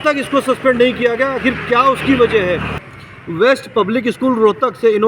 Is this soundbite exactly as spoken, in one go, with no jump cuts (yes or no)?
no